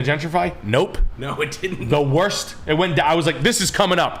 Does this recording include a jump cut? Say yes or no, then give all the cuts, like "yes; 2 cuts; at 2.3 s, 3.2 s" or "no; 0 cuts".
no; 0 cuts